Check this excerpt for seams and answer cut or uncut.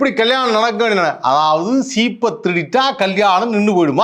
uncut